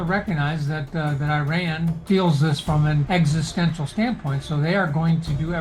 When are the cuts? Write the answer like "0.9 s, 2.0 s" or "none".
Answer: 2.0 s, 3.0 s